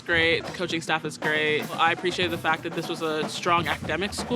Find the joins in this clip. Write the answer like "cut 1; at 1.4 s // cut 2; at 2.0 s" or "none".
cut 1; at 1.8 s

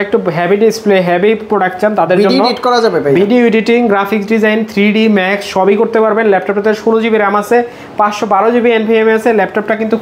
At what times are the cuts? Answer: none

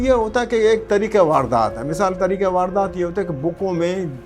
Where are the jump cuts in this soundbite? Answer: none

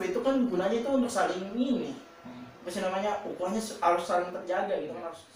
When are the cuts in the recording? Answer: none

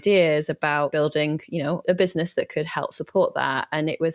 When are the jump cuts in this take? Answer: cut 1; at 0.9 s // cut 2; at 1.8 s

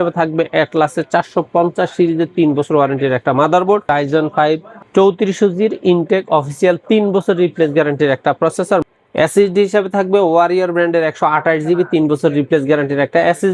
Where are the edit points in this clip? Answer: cut 1; at 3.9 s // cut 2; at 8.8 s

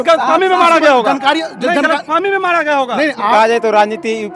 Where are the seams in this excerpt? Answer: cut 1; at 3.3 s

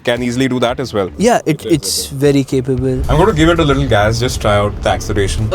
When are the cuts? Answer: cut 1; at 3.0 s

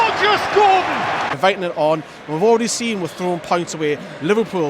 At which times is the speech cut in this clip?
cut 1; at 1.3 s

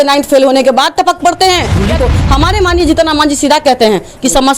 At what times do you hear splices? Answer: cut 1; at 1.9 s

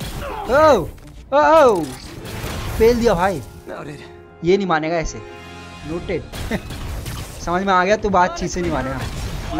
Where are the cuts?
none

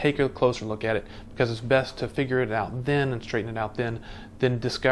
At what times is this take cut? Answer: none

